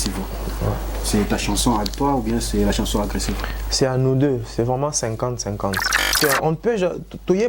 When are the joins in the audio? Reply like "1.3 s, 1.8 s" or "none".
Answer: 6.2 s